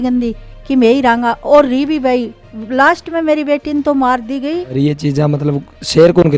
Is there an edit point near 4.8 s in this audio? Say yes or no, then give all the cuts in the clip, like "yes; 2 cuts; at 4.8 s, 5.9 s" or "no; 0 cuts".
yes; 1 cut; at 4.8 s